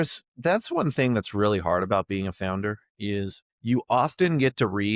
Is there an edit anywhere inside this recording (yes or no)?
yes